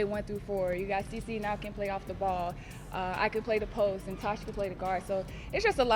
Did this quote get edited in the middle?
no; 0 cuts

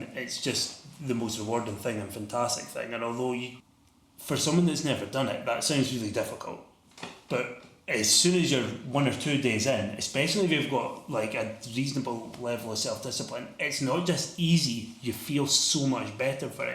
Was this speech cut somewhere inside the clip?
yes; 1 cut; at 3.6 s

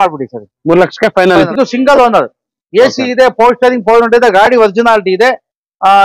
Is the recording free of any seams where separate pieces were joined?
no; 1 cut; at 1.5 s

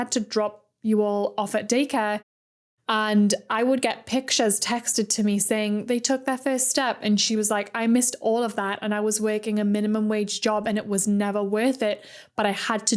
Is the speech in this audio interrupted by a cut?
no; 0 cuts

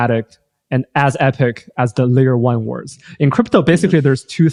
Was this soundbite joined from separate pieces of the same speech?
no; 0 cuts

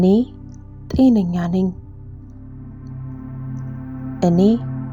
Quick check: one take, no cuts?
yes; 0 cuts

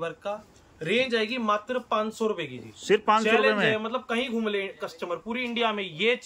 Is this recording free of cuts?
yes; 0 cuts

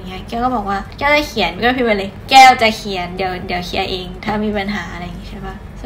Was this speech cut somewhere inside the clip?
no; 0 cuts

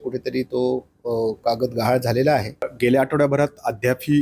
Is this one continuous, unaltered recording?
no; 1 cut; at 2.7 s

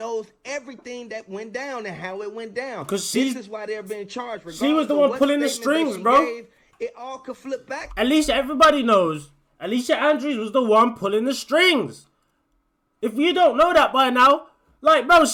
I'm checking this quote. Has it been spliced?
no; 0 cuts

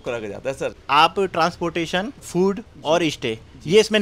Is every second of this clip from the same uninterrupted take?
no; 2 cuts; at 0.8 s, 2.3 s

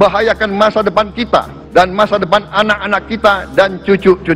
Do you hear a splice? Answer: yes; 1 cut; at 1.6 s

